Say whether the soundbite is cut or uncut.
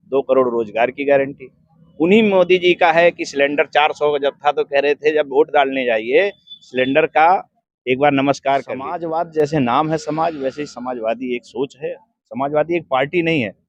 cut